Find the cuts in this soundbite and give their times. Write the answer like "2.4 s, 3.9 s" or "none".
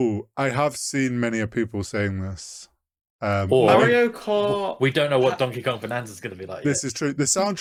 none